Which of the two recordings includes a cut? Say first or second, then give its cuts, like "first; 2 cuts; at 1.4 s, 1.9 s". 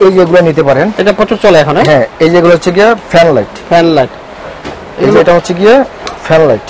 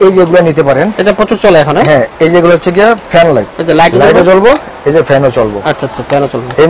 second; 1 cut; at 3.5 s